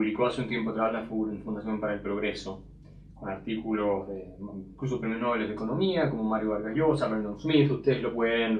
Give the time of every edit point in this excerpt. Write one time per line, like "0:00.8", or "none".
0:01.4